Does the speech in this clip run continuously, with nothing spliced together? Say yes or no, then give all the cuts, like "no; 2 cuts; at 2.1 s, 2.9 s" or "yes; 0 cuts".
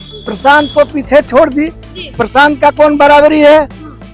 yes; 0 cuts